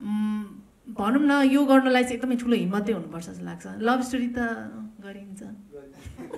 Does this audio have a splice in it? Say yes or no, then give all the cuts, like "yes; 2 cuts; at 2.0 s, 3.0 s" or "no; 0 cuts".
no; 0 cuts